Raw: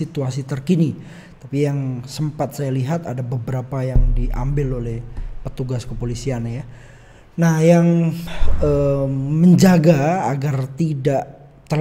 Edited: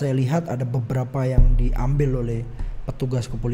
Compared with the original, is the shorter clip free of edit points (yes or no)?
yes